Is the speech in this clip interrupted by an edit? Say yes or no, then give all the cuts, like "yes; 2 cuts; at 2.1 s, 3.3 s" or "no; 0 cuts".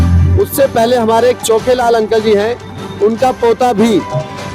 no; 0 cuts